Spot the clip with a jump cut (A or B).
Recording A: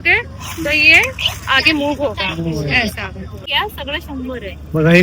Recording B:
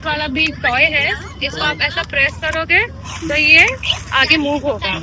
A